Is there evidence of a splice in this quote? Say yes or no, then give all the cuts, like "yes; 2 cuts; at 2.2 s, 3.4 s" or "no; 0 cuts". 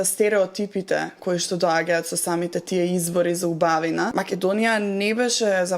yes; 1 cut; at 4.1 s